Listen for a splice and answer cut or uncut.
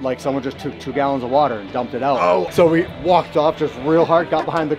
cut